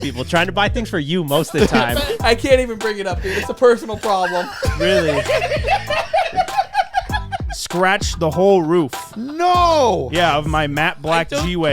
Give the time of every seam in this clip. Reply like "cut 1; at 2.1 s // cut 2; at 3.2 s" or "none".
cut 1; at 2.2 s // cut 2; at 7.6 s